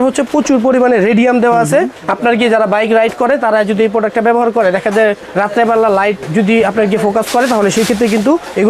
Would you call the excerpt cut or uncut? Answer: uncut